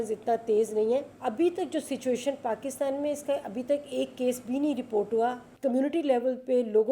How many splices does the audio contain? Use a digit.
2